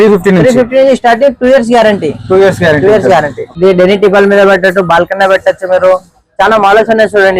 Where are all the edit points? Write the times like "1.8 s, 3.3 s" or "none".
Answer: 3.5 s